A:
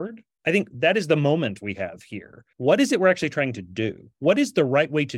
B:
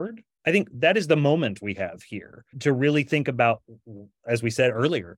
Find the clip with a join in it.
A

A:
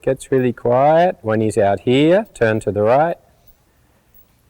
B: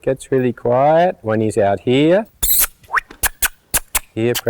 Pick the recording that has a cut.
B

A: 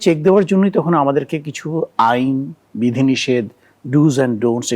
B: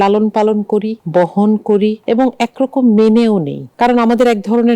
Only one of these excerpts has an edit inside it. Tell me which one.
B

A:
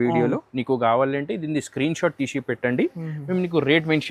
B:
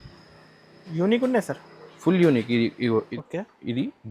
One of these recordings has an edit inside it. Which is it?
B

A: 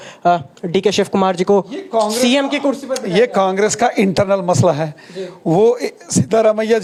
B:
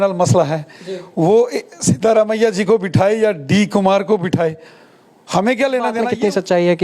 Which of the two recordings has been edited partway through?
B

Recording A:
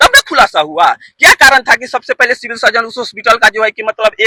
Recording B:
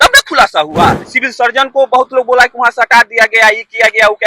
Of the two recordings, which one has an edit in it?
B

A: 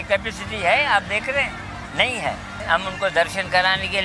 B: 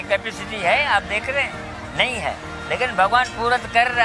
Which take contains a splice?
A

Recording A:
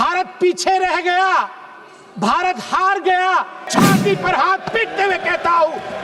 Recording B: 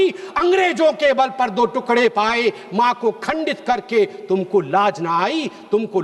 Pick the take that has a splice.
A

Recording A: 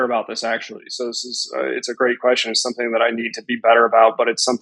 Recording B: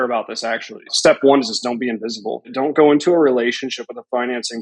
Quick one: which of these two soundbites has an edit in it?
B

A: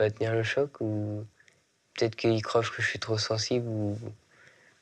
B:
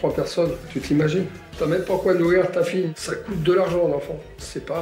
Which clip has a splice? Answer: B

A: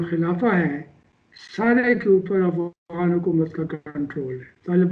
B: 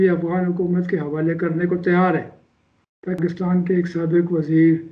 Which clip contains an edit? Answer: B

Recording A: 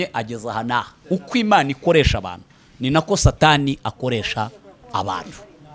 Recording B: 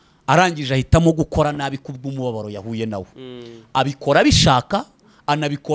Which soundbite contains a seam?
A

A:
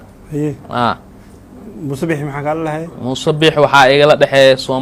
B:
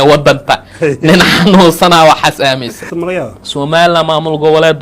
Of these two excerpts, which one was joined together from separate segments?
B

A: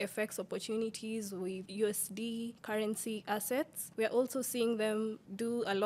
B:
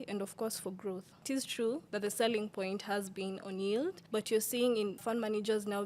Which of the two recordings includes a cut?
B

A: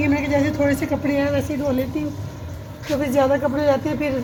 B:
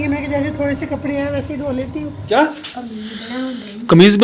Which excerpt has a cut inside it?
B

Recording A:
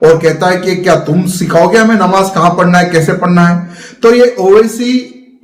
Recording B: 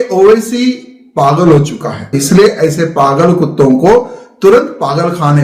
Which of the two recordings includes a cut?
B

